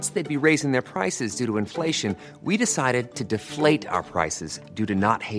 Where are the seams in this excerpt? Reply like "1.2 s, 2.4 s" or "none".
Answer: none